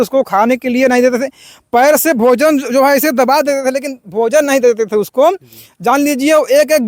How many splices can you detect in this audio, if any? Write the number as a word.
zero